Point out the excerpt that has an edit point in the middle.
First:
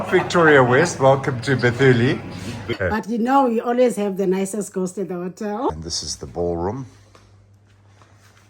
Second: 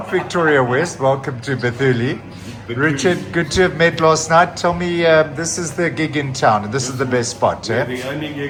first; 2 cuts; at 2.7 s, 5.7 s

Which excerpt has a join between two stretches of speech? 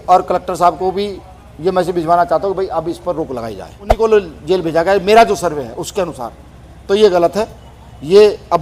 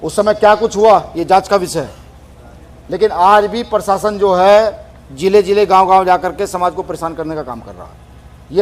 first; 1 cut; at 3.9 s

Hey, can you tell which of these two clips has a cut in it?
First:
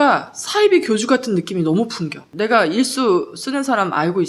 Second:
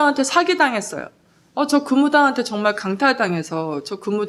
first; 1 cut; at 2.2 s

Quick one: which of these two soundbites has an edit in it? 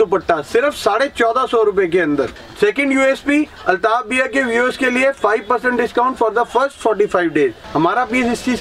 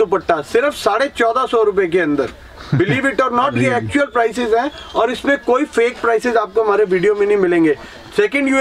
first; 2 cuts; at 2.4 s, 7.6 s

